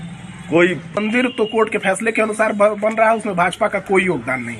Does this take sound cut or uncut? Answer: cut